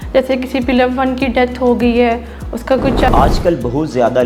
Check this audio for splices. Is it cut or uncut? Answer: cut